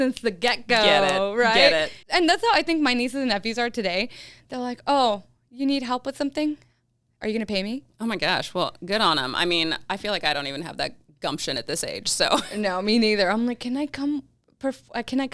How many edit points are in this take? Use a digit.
1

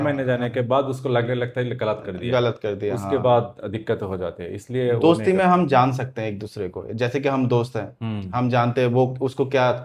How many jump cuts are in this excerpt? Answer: 0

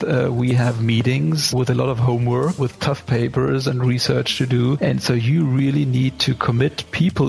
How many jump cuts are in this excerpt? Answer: 3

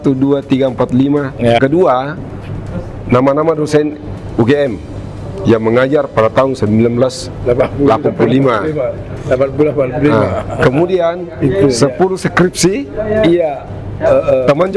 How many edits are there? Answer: 1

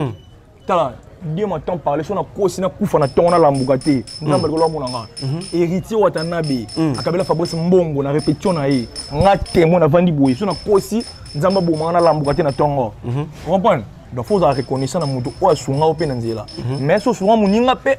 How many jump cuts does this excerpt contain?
0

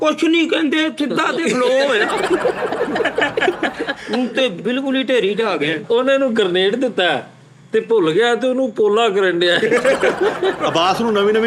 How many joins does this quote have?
0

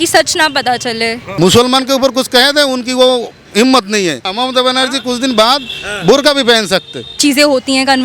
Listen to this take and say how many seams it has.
3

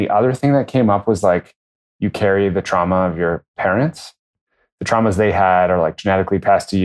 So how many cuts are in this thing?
1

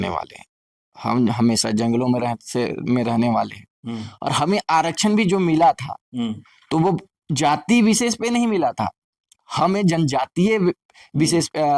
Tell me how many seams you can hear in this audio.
0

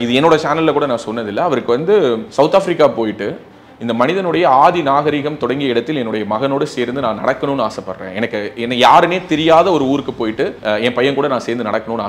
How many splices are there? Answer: 2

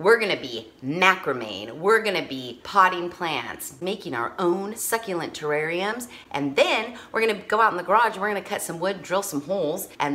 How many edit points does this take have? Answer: 0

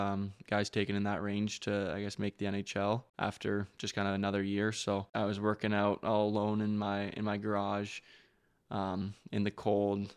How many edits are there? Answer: 2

